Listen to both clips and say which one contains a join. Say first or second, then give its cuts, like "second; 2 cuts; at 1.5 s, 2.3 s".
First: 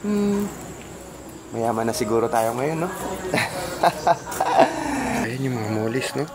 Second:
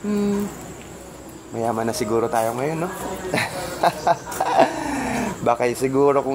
first; 1 cut; at 5.3 s